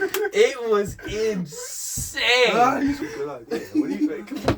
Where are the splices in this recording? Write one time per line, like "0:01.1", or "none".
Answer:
0:03.0